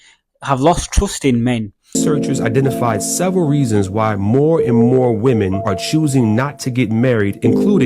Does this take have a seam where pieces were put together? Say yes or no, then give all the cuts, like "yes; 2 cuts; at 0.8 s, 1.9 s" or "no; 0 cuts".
yes; 1 cut; at 2.0 s